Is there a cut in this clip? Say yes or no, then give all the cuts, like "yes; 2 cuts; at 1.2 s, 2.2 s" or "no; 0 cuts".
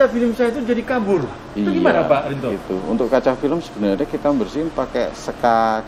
no; 0 cuts